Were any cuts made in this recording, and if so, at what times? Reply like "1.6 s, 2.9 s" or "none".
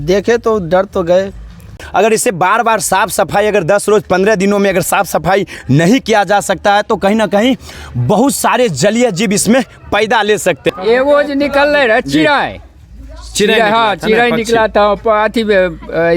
1.9 s, 10.7 s